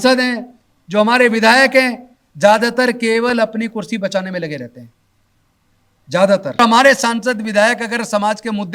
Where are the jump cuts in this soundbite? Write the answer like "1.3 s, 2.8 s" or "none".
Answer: 6.6 s

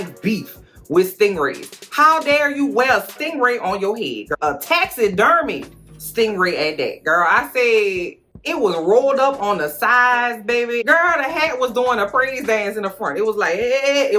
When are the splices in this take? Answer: 10.8 s

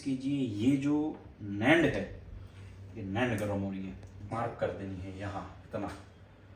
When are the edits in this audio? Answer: 4.3 s

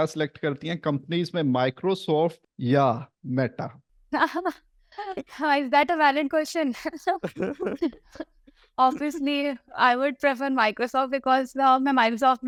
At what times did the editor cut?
none

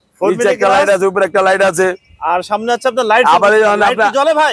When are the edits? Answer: none

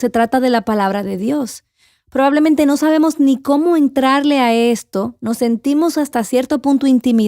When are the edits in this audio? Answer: 6.1 s

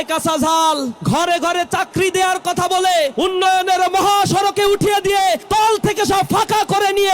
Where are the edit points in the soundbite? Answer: 0.9 s, 3.1 s, 5.4 s

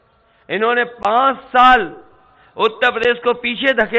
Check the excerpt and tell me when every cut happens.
none

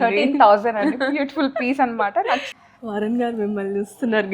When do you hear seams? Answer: 2.5 s

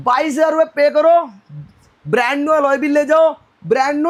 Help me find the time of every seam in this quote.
none

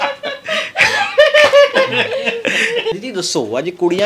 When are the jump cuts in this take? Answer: 2.9 s

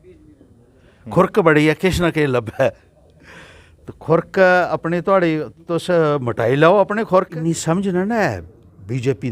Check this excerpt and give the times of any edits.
7.4 s

